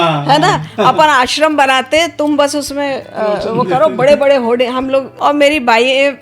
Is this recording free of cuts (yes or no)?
no